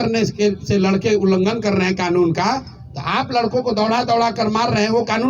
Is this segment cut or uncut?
uncut